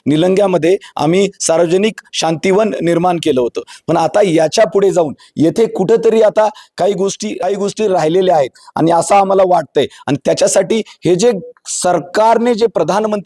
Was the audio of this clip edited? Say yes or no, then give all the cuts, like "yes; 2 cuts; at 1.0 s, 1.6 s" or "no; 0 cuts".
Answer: yes; 1 cut; at 7.3 s